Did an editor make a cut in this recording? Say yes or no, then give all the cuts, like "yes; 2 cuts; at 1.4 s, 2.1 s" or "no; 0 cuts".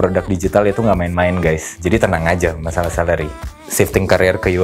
yes; 2 cuts; at 1.7 s, 3.6 s